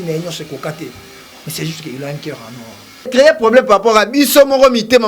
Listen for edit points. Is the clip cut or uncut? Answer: cut